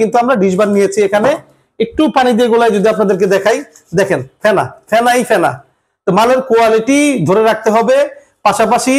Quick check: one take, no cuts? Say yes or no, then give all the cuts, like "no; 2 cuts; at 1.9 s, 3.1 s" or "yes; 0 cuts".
yes; 0 cuts